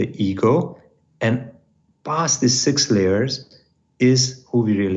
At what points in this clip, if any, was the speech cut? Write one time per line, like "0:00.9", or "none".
none